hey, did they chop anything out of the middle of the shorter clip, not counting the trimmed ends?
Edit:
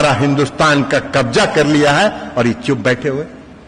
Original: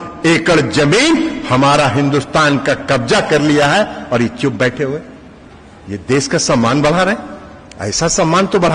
no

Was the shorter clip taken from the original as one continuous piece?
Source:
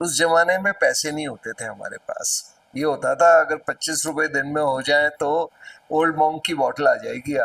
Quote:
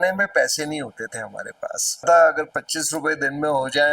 no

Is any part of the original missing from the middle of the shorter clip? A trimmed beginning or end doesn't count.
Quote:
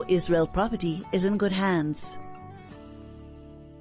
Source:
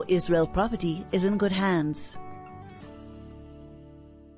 yes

